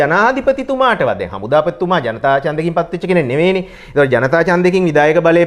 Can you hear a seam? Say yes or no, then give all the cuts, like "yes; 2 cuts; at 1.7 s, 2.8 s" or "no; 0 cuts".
no; 0 cuts